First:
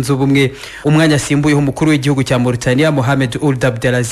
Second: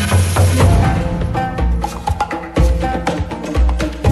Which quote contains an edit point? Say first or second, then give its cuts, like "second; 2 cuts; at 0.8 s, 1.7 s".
second; 1 cut; at 3.1 s